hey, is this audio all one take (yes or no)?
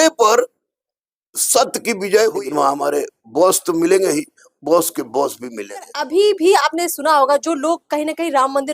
no